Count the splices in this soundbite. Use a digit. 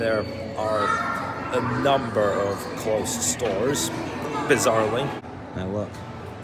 0